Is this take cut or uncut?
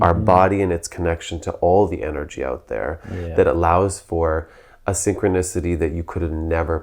uncut